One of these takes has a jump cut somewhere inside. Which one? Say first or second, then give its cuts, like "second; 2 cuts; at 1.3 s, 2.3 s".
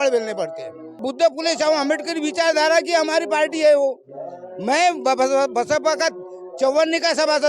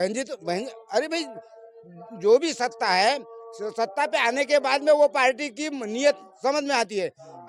first; 1 cut; at 1.0 s